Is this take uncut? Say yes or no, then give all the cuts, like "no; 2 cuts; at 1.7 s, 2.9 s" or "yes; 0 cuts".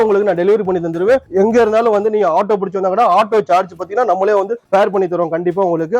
no; 2 cuts; at 1.3 s, 4.6 s